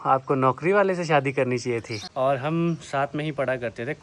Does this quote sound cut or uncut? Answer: cut